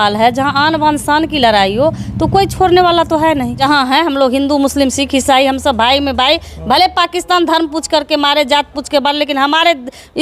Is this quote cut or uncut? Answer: cut